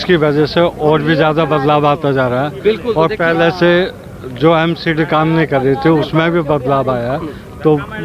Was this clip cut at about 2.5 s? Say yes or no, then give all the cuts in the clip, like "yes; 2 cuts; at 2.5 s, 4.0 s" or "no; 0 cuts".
no; 0 cuts